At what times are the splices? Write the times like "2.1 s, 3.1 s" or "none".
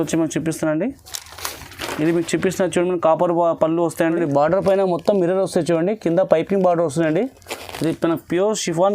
4.2 s

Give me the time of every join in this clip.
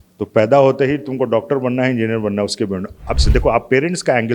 3.2 s

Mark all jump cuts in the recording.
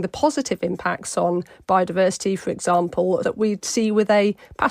3.2 s

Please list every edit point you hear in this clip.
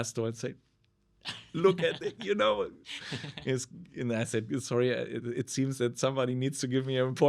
none

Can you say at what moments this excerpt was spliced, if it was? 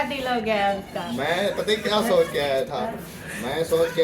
2.9 s

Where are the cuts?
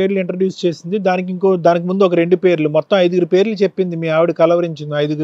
none

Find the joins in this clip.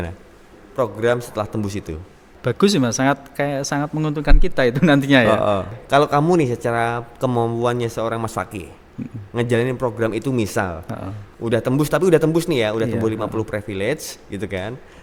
none

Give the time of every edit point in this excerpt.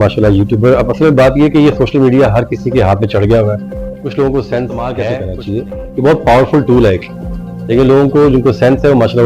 5.1 s

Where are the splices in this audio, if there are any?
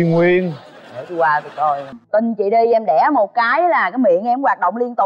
1.9 s

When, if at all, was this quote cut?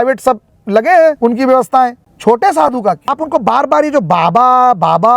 1.2 s, 2.1 s, 3.1 s

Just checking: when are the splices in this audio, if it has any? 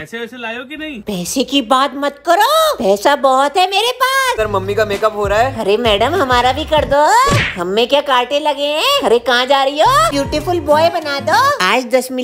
4.4 s, 10.1 s

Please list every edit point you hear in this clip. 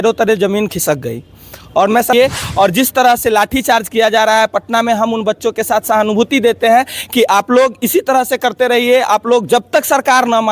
2.1 s

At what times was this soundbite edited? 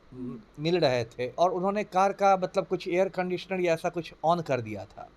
1.3 s

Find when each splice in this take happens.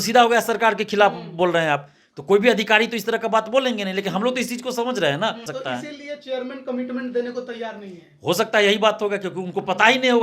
5.5 s

